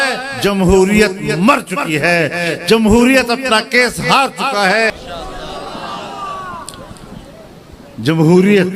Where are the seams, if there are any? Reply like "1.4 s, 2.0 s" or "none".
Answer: 4.9 s